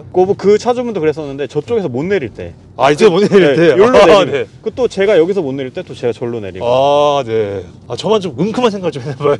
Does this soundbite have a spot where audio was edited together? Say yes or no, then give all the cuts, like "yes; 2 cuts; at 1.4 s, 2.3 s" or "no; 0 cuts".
no; 0 cuts